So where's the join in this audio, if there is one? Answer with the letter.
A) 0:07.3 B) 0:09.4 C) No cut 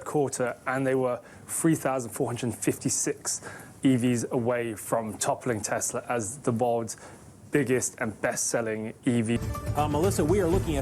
B